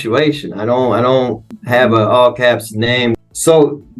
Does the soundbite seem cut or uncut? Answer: cut